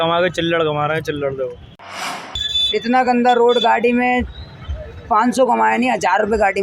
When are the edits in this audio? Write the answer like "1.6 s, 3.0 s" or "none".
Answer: 2.1 s